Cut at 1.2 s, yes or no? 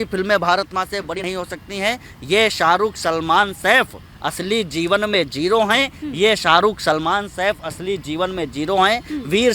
yes